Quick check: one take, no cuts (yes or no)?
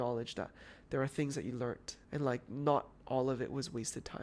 no